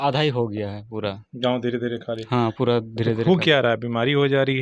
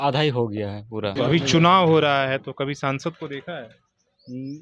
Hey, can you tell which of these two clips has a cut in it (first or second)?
second